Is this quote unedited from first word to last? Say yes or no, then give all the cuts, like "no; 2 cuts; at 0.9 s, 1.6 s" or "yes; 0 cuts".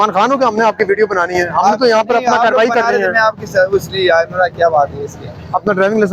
yes; 0 cuts